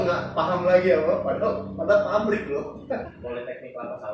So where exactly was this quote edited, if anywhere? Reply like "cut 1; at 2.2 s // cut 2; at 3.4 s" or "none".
cut 1; at 2.8 s